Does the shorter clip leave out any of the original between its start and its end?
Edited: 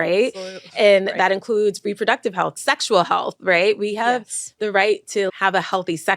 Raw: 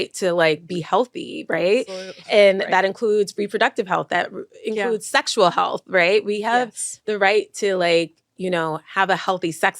yes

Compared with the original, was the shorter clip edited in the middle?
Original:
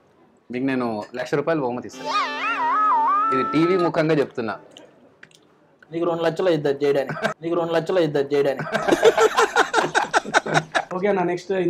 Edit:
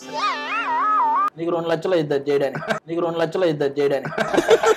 yes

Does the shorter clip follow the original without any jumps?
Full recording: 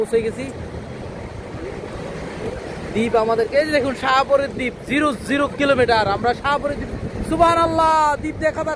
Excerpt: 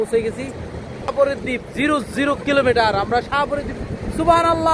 no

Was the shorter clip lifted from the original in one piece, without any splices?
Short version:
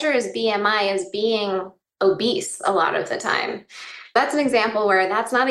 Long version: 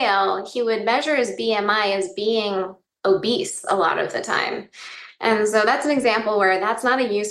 no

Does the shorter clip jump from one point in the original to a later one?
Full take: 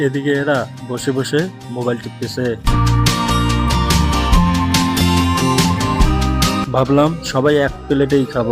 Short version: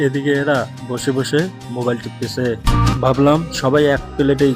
yes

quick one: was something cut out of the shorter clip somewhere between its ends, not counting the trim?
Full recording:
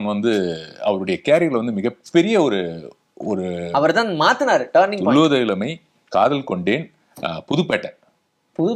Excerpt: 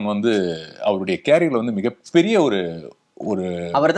no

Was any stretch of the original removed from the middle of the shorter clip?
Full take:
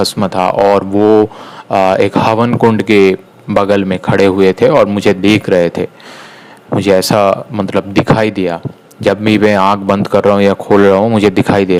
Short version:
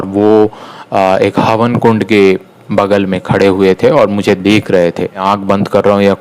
yes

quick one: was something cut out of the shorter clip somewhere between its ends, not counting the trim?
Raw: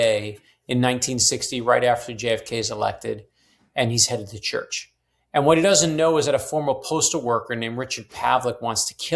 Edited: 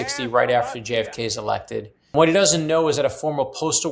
yes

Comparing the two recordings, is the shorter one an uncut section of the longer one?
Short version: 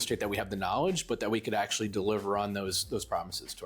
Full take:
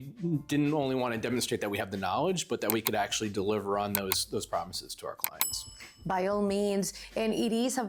yes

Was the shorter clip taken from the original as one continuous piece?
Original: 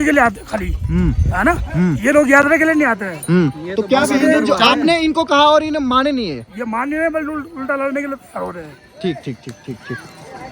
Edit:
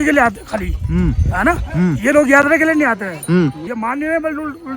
no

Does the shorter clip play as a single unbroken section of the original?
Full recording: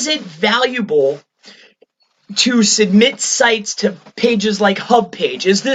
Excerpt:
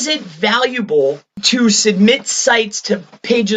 no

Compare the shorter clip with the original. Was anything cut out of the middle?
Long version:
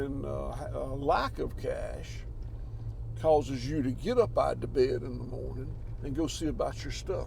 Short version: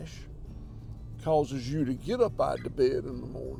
no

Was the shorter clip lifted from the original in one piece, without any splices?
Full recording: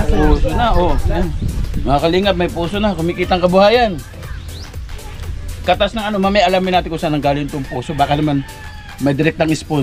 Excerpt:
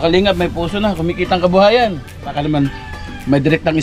no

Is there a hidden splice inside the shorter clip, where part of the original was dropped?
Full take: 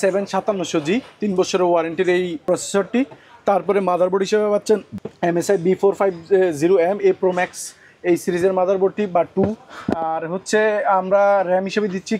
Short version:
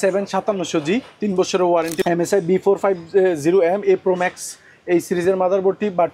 yes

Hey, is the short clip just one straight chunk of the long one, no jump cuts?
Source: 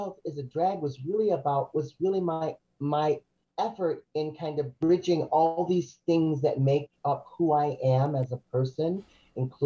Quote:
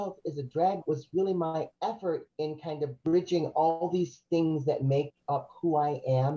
no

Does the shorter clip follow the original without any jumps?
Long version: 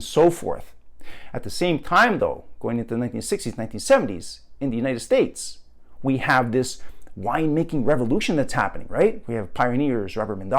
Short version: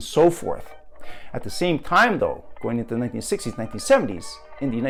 yes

